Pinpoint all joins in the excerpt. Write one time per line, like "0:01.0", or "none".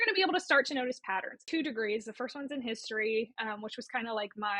0:01.4